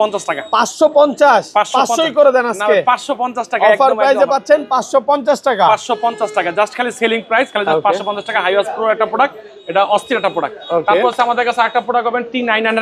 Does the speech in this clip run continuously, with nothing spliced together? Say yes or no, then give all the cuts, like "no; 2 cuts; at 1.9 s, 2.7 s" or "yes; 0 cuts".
yes; 0 cuts